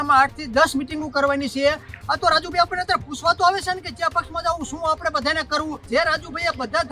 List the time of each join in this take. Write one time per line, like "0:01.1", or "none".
0:02.0
0:05.8